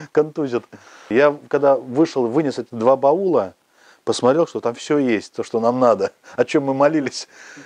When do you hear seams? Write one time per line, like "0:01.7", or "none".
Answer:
0:01.1